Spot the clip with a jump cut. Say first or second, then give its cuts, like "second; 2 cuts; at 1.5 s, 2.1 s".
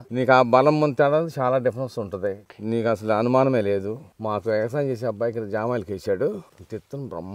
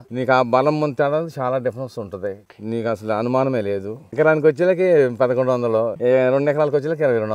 first; 1 cut; at 4.0 s